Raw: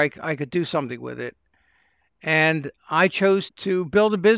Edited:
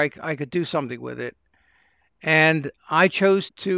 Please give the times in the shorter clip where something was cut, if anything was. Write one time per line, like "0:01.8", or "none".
none

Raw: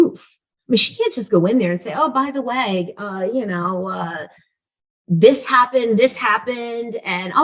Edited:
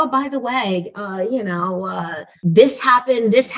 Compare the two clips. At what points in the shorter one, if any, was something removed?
0:02.2

